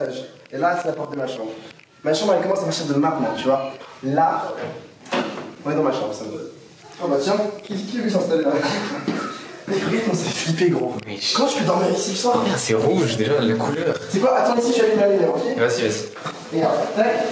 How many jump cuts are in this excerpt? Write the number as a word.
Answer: zero